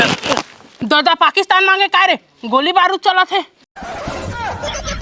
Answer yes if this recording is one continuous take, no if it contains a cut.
no